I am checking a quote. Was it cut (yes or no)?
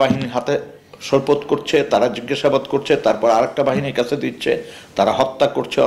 no